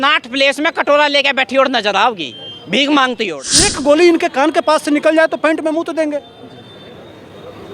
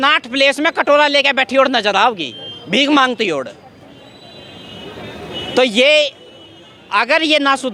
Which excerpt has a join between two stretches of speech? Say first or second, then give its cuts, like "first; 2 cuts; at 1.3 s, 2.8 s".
first; 1 cut; at 3.7 s